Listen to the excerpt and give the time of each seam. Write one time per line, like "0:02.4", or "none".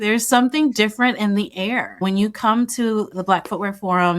0:02.0
0:03.1